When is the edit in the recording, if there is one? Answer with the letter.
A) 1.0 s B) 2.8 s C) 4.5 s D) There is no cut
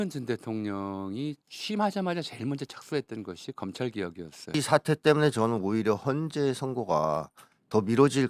C